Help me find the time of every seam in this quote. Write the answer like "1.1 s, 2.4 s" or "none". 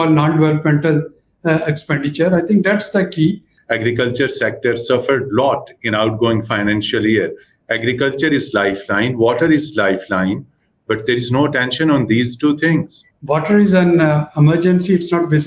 3.5 s, 13.1 s